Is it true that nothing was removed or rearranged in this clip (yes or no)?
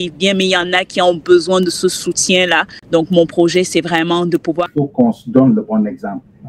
no